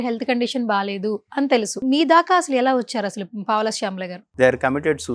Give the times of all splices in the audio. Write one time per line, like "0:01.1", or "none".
0:01.8
0:04.2